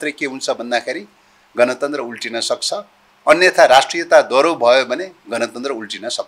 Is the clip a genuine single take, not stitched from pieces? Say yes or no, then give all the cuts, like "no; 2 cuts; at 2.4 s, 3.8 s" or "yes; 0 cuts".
yes; 0 cuts